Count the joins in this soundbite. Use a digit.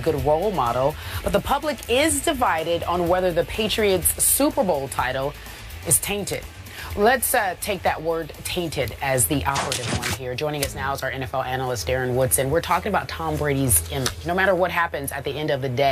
1